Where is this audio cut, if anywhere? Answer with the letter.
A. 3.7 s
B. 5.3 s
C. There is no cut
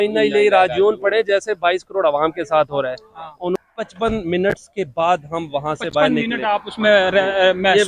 A